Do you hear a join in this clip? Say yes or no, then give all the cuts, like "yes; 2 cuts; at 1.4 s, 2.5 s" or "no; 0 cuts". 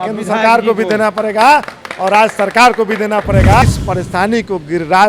yes; 1 cut; at 3.6 s